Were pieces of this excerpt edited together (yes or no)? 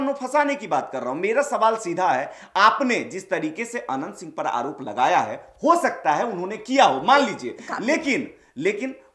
no